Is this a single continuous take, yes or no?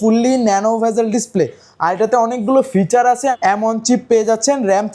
no